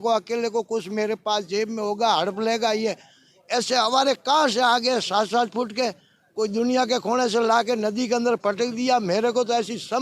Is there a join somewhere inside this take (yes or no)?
no